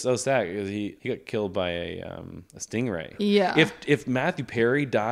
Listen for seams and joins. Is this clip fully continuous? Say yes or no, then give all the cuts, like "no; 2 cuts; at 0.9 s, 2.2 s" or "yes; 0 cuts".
no; 2 cuts; at 1.0 s, 3.1 s